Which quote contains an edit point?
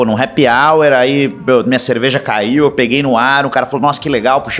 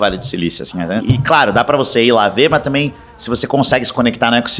second; 1 cut; at 1.0 s

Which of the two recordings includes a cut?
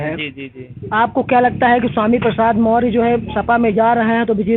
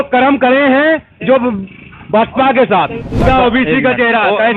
second; 1 cut; at 3.2 s

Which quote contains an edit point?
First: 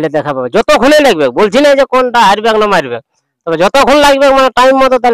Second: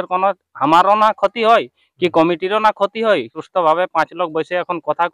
second; 1 cut; at 3.4 s

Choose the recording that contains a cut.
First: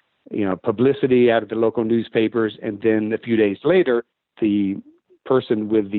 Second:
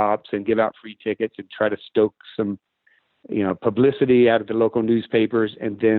first; 1 cut; at 4.2 s

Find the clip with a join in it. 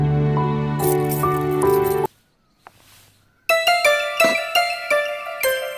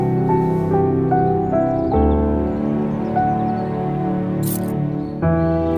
first; 1 cut; at 2.1 s

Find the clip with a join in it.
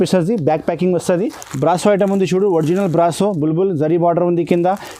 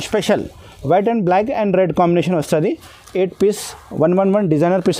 first; 1 cut; at 1.4 s

